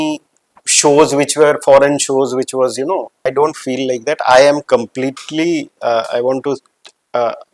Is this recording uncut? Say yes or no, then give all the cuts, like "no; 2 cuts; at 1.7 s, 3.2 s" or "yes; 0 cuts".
no; 1 cut; at 3.2 s